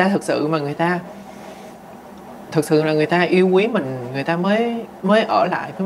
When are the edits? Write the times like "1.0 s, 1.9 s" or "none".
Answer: none